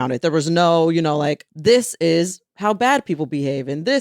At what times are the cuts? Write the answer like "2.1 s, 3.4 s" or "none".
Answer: 1.4 s, 2.4 s